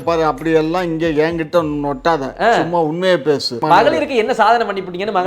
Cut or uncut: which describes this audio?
cut